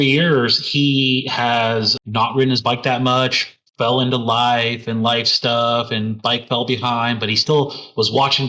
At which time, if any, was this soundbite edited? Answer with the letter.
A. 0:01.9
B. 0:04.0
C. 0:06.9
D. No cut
A